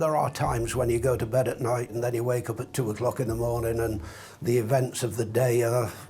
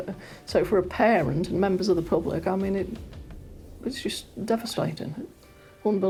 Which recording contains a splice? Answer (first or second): first